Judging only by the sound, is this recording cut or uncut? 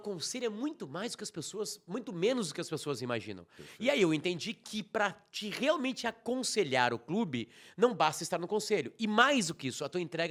uncut